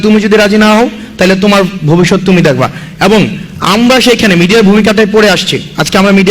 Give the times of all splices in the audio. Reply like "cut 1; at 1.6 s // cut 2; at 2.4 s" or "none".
none